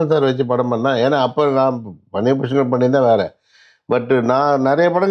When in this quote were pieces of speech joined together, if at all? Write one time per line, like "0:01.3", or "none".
none